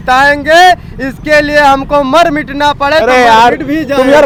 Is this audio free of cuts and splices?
yes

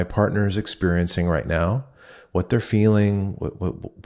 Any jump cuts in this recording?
no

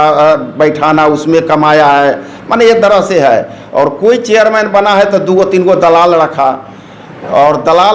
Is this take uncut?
yes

